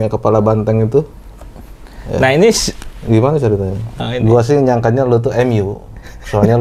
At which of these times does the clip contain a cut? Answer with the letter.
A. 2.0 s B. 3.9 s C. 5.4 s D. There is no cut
B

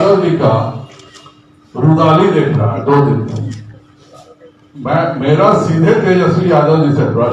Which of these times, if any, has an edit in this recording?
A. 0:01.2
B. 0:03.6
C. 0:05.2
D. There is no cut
D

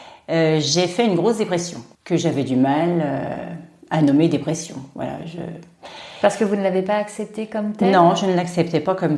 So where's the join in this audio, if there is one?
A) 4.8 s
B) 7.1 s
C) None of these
C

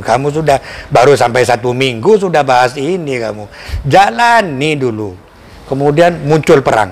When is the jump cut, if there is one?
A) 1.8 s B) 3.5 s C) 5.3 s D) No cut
C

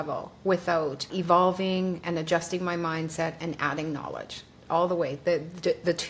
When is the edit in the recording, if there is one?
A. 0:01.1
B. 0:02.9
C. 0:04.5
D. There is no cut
A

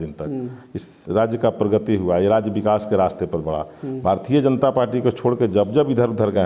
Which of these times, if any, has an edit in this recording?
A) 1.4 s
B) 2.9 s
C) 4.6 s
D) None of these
D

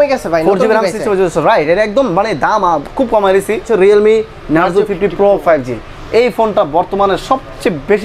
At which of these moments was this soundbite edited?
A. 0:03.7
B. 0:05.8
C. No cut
A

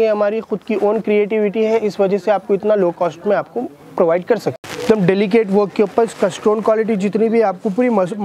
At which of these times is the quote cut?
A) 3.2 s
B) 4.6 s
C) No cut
B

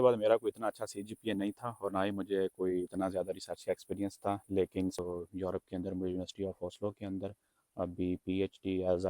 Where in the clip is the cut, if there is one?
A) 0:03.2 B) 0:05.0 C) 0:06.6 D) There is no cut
B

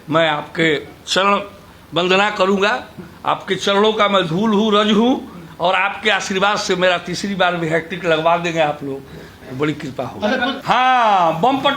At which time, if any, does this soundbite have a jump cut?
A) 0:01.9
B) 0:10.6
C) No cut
B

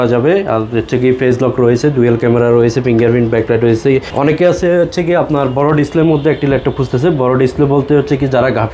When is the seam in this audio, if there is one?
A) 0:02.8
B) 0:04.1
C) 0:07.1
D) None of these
B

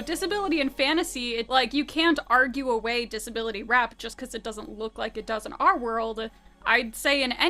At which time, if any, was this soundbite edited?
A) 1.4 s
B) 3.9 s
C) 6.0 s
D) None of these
A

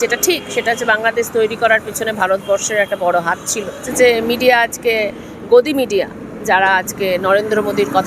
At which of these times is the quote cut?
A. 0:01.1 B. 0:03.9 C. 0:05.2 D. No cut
B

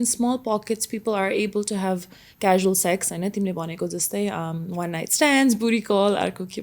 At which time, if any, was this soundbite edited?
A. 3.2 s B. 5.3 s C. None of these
C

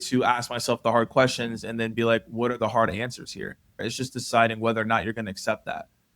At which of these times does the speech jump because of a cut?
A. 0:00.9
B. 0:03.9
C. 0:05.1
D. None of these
B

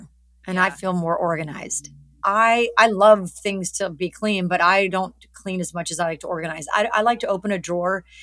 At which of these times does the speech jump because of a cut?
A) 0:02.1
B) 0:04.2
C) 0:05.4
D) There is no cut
D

